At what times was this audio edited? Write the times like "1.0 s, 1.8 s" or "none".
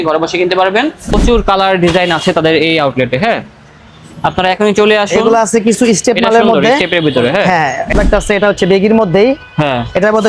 1.2 s, 7.9 s